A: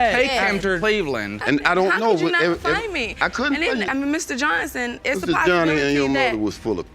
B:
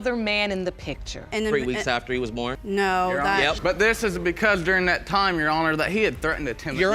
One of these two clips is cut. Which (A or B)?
A